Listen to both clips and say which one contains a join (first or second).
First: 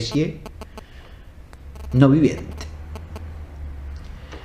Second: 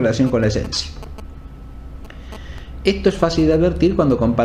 second